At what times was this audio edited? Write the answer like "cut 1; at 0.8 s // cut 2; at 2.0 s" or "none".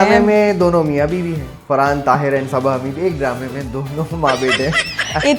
none